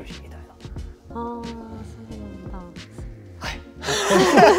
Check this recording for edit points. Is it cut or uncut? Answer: uncut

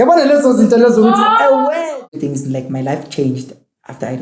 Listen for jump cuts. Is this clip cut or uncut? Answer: cut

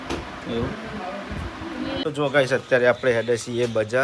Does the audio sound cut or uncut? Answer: cut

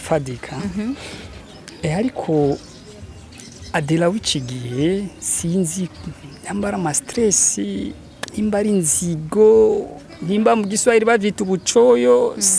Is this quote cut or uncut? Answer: uncut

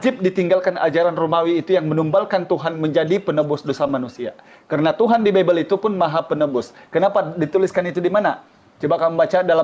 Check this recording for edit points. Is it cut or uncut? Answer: uncut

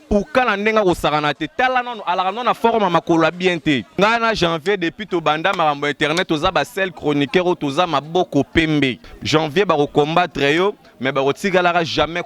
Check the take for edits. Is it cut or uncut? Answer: cut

